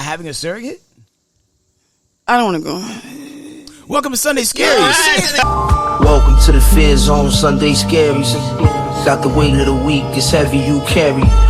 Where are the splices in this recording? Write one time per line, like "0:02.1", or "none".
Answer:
0:05.5